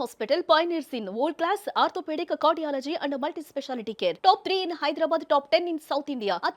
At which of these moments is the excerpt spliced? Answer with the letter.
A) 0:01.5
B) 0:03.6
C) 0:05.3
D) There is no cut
D